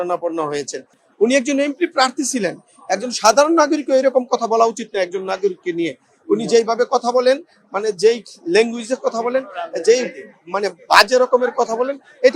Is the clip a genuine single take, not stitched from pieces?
no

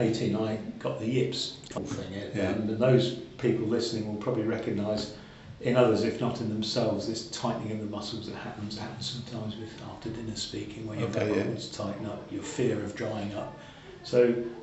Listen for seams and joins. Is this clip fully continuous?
no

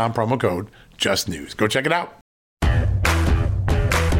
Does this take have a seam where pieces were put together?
yes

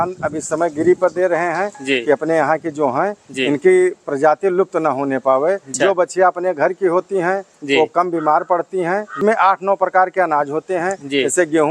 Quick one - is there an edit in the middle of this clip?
yes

